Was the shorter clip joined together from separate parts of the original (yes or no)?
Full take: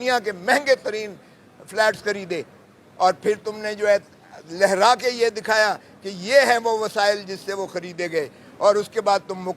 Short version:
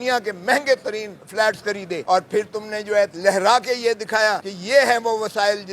yes